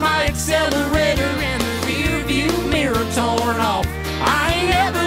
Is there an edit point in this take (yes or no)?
no